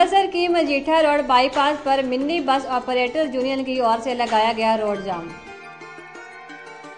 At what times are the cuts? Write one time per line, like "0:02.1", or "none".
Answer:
none

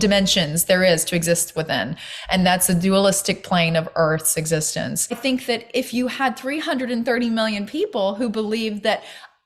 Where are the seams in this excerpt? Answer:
0:05.2

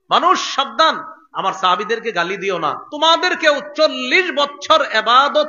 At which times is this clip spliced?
0:02.9

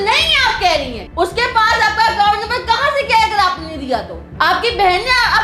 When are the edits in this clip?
0:01.0
0:04.2

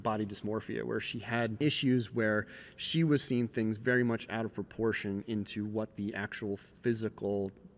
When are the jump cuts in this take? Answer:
0:01.5

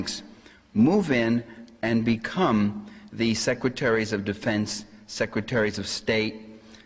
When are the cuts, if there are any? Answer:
0:04.8

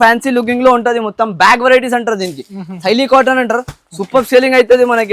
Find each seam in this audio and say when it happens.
none

